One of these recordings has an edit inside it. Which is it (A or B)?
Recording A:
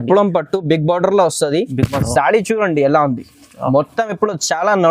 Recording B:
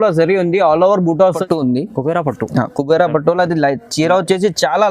B